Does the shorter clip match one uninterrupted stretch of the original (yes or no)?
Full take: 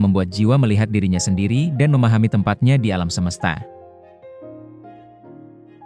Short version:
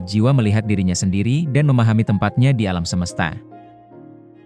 no